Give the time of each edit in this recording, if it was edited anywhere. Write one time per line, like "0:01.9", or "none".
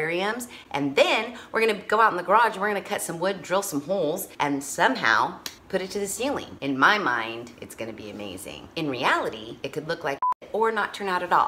0:06.5
0:10.3